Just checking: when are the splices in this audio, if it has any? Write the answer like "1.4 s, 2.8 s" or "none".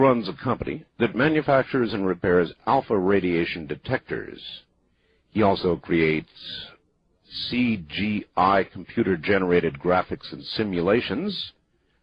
5.3 s